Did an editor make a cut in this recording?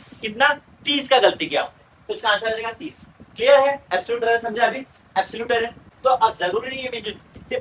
yes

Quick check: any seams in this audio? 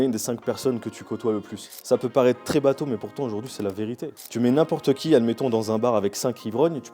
yes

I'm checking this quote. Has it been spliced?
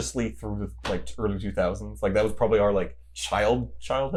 no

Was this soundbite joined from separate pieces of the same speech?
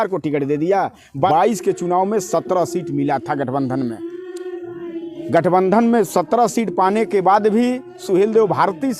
yes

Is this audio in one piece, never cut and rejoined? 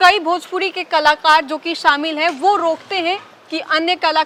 yes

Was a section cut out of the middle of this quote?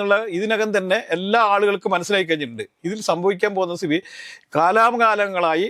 no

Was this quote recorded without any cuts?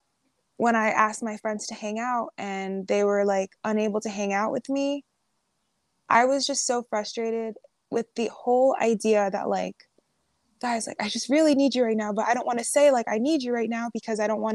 yes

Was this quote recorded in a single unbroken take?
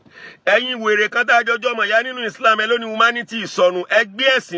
yes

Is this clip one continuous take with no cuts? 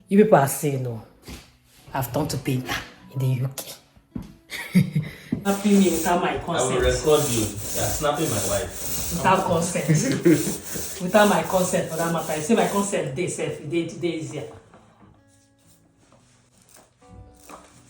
no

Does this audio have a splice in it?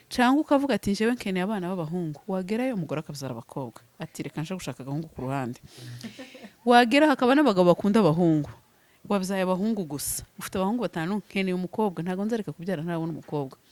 no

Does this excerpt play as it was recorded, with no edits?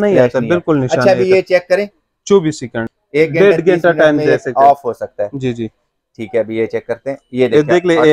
no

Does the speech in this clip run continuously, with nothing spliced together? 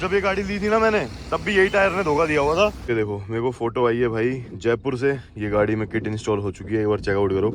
no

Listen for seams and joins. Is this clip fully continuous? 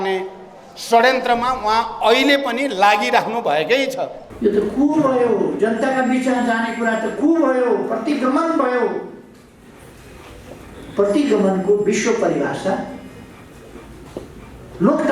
no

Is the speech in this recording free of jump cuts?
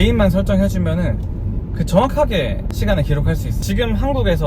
no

